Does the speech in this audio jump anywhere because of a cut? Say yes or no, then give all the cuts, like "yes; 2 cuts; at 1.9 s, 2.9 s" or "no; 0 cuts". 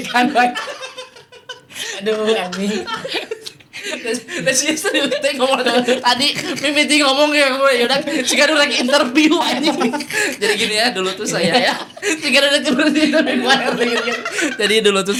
no; 0 cuts